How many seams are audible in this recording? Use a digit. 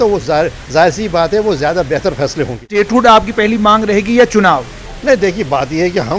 1